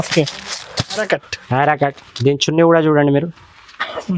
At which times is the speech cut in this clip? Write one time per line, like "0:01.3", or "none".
0:01.0